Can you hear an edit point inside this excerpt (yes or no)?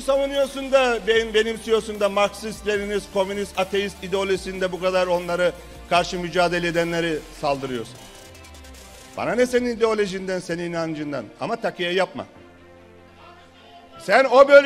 no